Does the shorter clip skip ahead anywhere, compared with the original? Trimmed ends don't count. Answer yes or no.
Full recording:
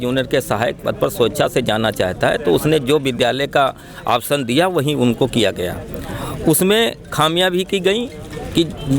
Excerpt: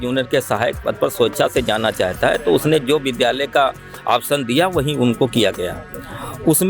no